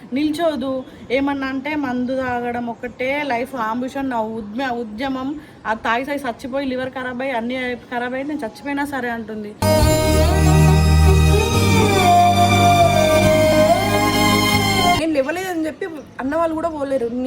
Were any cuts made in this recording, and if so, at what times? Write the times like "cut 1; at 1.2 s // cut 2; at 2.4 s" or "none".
cut 1; at 15.0 s